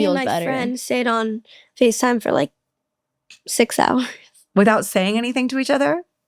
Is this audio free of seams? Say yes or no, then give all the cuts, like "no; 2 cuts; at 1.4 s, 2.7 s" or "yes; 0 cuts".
yes; 0 cuts